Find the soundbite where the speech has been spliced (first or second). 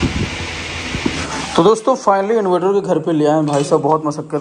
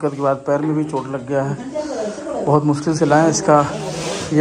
first